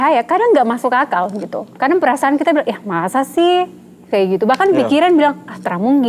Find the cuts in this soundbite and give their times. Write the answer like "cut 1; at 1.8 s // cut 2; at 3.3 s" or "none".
none